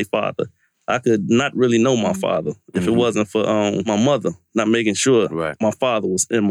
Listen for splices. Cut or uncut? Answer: cut